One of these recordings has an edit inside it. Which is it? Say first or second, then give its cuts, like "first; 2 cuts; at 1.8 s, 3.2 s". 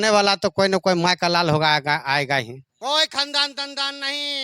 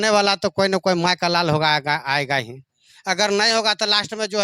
first; 1 cut; at 2.7 s